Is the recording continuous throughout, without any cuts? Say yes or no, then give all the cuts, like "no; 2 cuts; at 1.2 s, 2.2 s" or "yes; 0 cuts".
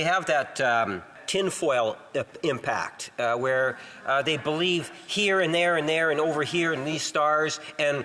no; 1 cut; at 1.2 s